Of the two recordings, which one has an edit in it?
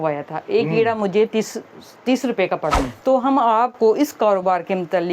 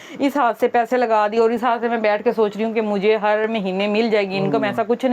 first; 1 cut; at 2.7 s

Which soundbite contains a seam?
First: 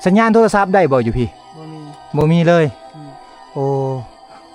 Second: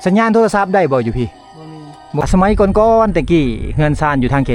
second; 1 cut; at 2.2 s

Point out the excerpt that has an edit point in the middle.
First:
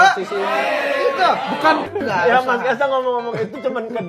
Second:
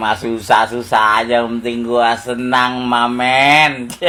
first; 1 cut; at 1.9 s

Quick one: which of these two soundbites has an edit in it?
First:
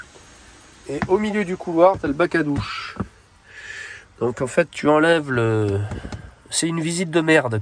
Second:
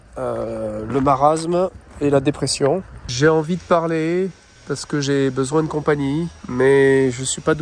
second; 3 cuts; at 3.0 s, 4.5 s, 6.4 s

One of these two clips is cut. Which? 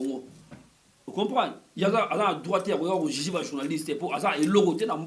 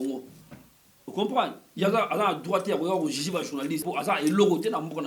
second; 1 cut; at 3.8 s

